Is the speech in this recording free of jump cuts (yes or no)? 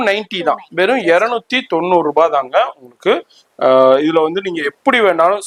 yes